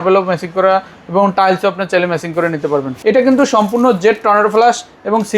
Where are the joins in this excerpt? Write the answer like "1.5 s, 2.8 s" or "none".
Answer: 2.9 s